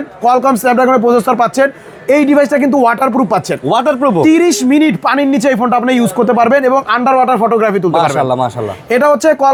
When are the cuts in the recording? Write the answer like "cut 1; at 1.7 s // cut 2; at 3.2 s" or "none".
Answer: none